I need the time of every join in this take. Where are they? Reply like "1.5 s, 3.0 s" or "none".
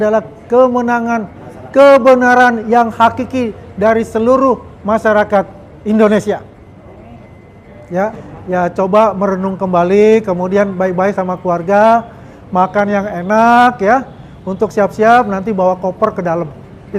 8.3 s